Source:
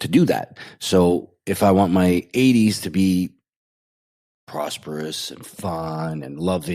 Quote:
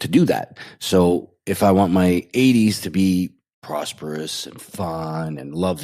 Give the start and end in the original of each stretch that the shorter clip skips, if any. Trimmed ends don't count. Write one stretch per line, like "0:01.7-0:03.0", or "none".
0:03.5-0:04.3

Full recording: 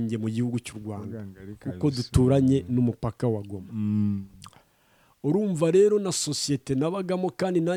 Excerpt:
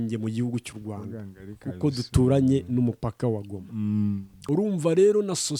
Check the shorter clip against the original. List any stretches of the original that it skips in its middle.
0:04.3-0:05.1

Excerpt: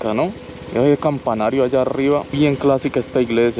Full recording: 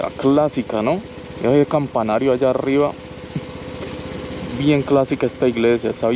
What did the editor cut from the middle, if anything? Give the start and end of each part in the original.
0:03.0-0:04.6

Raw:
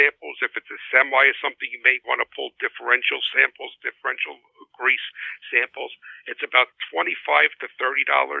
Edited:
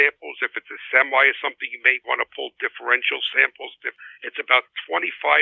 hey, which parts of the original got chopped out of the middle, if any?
0:03.9-0:06.0

